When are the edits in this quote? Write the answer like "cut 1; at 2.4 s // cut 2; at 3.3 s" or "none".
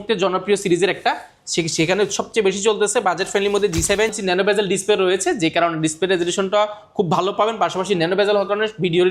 cut 1; at 4.1 s